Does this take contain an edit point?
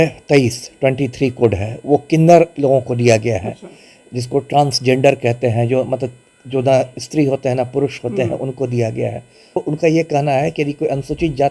yes; 1 cut; at 9.6 s

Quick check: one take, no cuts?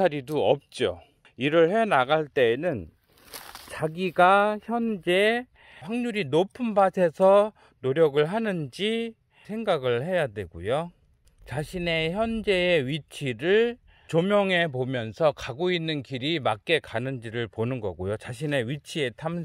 no; 2 cuts; at 1.2 s, 14.1 s

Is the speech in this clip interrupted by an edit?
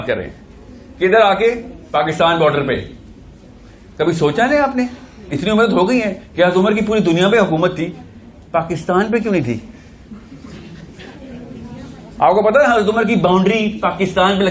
no; 0 cuts

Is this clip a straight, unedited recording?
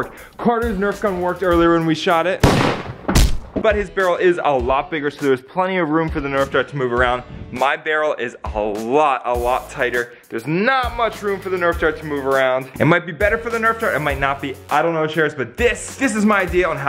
yes; 0 cuts

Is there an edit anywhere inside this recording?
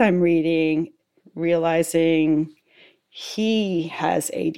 yes; 1 cut; at 0.9 s

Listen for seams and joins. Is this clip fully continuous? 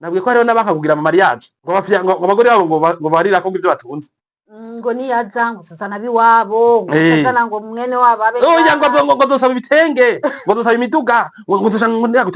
no; 1 cut; at 1.5 s

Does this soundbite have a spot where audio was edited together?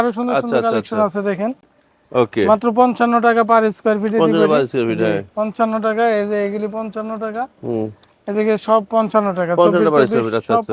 no; 0 cuts

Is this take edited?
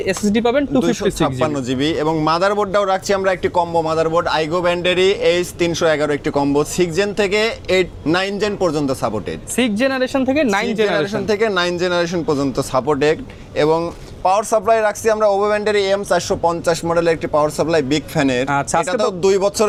no; 0 cuts

